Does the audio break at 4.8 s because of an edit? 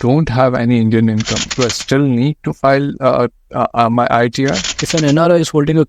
yes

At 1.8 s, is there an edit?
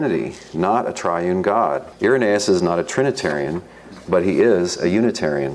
yes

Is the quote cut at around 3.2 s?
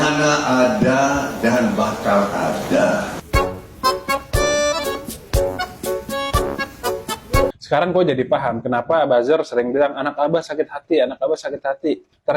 no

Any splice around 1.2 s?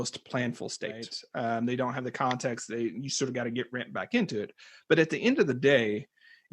yes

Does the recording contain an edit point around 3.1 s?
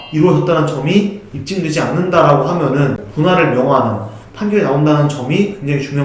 yes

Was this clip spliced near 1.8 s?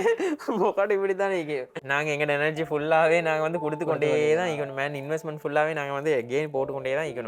yes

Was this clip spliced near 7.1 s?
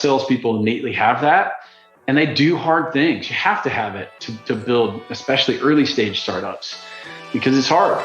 yes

